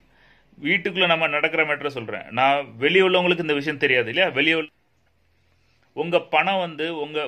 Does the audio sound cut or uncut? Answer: cut